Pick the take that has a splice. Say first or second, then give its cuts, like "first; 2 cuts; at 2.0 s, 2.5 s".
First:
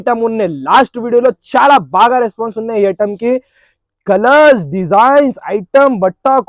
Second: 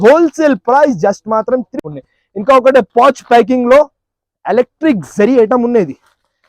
second; 1 cut; at 1.8 s